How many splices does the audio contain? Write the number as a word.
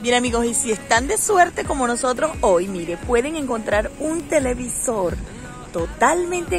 zero